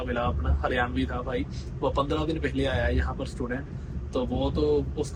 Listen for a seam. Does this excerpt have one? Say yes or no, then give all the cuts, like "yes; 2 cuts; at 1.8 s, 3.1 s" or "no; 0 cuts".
no; 0 cuts